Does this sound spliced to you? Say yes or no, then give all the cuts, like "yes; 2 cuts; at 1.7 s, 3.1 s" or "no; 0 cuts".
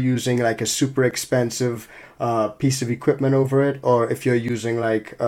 no; 0 cuts